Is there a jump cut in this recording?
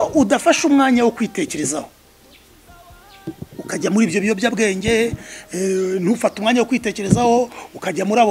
no; 0 cuts

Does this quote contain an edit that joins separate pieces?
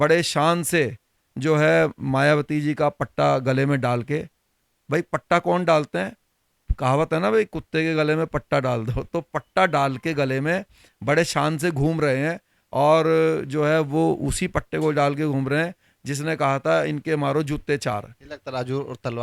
no; 0 cuts

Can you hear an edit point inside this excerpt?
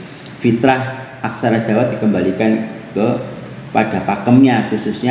no; 0 cuts

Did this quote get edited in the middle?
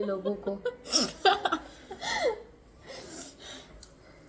no; 0 cuts

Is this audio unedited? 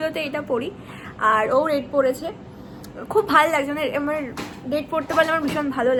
yes; 0 cuts

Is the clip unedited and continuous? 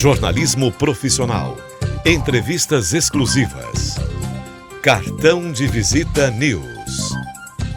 no; 1 cut; at 6.7 s

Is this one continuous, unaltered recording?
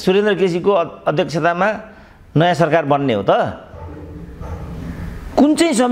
yes; 0 cuts

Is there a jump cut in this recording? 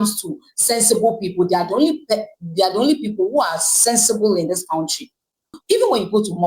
yes; 1 cut; at 5.5 s

